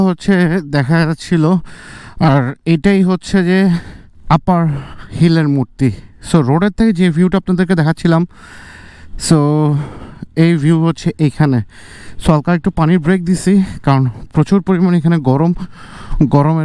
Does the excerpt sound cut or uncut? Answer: uncut